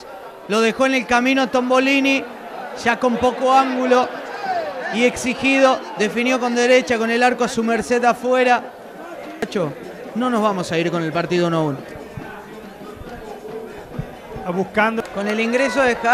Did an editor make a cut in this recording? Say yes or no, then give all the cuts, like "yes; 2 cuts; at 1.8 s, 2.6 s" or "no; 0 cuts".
no; 0 cuts